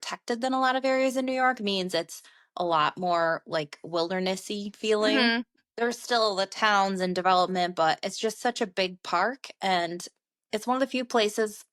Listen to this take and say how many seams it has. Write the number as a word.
zero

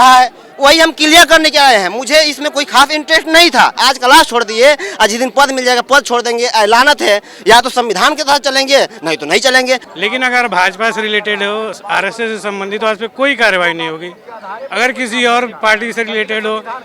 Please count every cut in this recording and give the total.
two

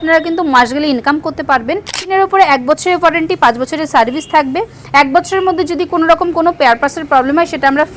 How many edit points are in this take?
one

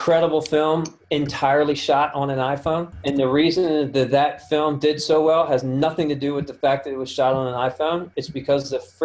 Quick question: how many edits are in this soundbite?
two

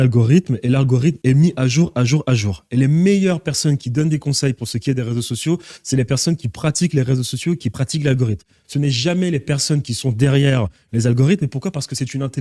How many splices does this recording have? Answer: one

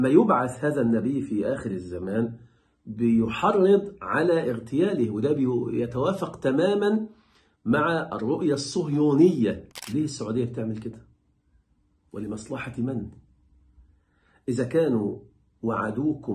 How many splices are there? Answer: one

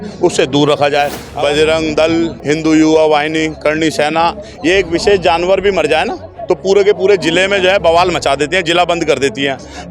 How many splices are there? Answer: two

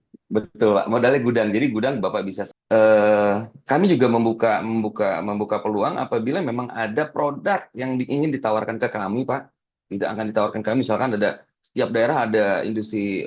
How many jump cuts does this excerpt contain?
one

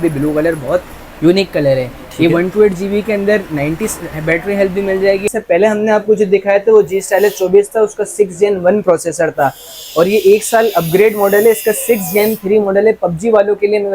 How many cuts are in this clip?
one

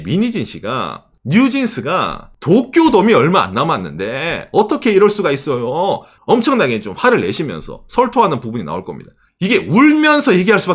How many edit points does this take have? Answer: three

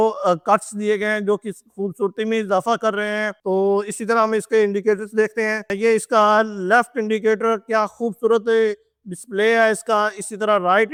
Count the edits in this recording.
zero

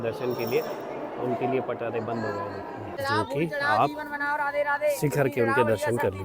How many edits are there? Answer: one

